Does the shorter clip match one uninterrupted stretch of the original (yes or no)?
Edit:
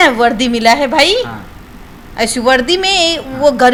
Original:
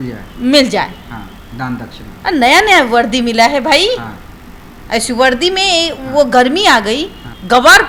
yes